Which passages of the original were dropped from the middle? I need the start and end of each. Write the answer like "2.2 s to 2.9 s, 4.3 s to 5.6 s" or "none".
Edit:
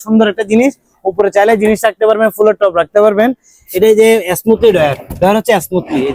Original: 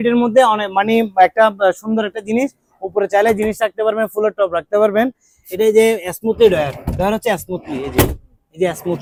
none